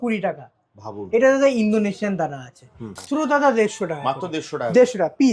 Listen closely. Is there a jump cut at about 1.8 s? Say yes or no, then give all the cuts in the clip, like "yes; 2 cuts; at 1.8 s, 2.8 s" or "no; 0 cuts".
no; 1 cut; at 3.0 s